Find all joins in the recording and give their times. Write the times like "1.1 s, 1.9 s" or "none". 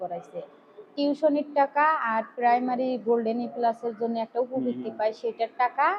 none